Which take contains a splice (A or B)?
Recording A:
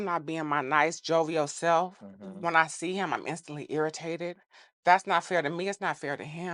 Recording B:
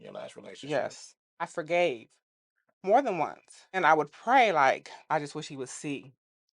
B